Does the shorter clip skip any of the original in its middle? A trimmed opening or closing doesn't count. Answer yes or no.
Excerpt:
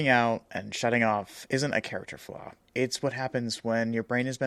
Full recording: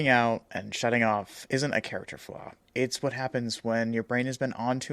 no